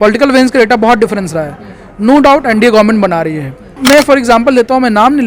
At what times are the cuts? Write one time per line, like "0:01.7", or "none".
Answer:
0:03.8